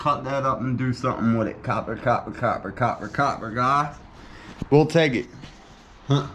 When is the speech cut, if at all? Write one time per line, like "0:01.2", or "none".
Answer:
none